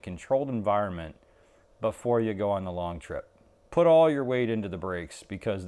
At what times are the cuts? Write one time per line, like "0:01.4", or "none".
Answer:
none